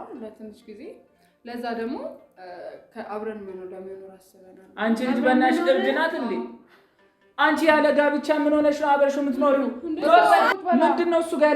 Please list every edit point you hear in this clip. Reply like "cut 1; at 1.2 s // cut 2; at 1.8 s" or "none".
cut 1; at 10.4 s

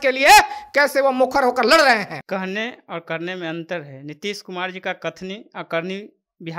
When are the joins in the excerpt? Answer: cut 1; at 2.2 s

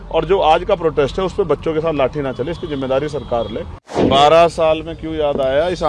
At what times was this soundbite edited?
cut 1; at 4.0 s

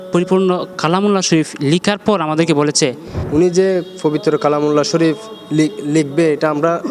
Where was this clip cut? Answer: cut 1; at 3.2 s

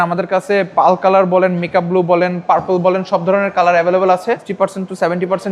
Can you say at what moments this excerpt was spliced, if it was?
cut 1; at 4.5 s

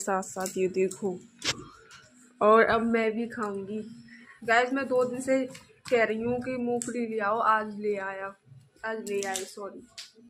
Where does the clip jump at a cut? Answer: none

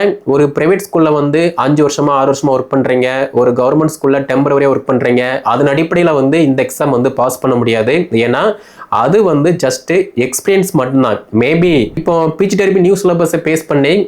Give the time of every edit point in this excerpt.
cut 1; at 12.0 s

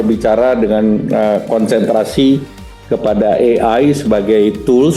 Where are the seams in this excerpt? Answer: none

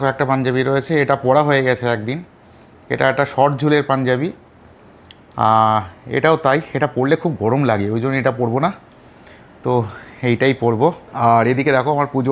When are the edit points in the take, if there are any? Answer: cut 1; at 11.1 s

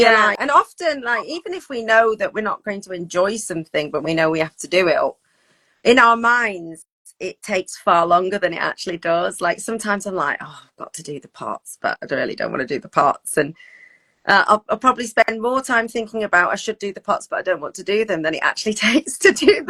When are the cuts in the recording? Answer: none

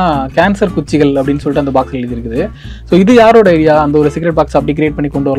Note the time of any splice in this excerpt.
none

